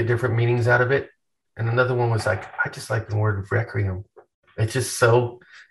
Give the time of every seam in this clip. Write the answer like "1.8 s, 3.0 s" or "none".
3.1 s